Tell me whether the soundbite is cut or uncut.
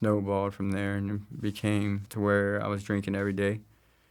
cut